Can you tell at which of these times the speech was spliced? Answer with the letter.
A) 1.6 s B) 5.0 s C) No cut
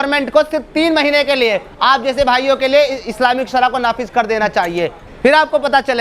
B